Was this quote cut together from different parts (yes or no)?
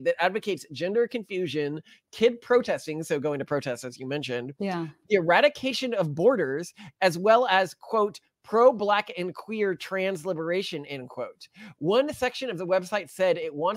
no